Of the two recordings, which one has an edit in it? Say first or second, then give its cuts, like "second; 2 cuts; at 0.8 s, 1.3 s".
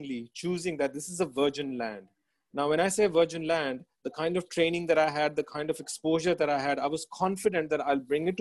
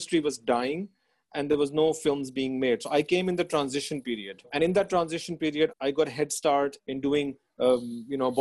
second; 3 cuts; at 4.5 s, 5.7 s, 6.8 s